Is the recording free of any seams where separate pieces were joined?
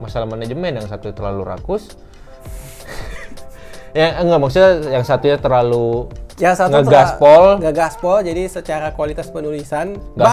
yes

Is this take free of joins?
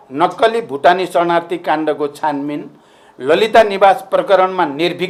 yes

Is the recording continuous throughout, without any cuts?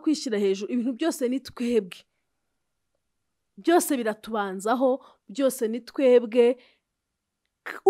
yes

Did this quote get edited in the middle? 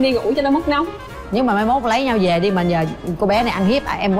yes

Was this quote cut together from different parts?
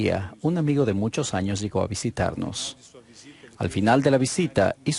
yes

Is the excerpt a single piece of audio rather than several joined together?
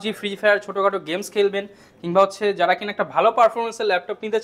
yes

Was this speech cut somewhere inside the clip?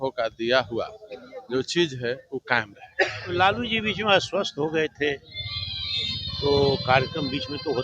yes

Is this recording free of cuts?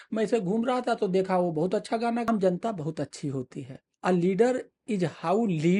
no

